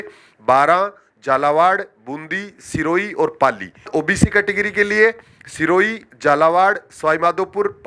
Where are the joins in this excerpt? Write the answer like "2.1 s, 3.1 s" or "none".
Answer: 3.9 s